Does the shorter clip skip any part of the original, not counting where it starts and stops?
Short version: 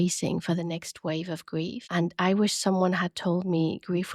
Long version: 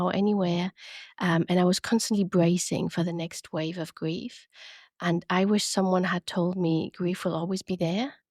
yes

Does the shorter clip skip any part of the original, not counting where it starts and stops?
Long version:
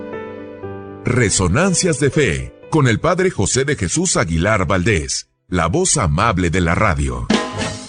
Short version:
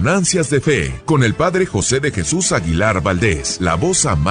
yes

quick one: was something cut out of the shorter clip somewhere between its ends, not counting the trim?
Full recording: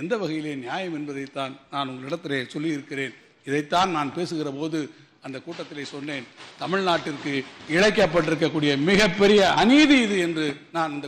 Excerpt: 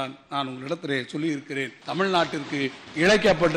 yes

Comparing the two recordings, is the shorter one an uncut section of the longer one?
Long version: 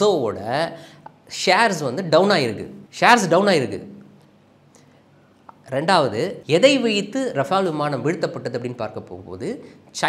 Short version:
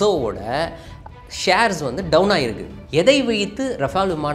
no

